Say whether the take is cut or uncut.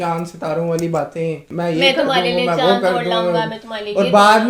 cut